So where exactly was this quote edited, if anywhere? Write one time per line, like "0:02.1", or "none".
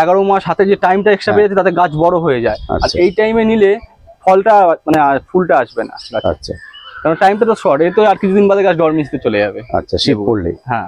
none